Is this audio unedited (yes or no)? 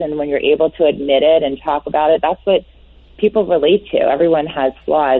yes